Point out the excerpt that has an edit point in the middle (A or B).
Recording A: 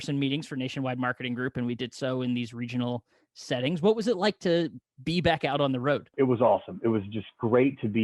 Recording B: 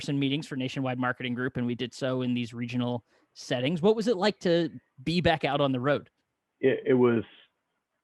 A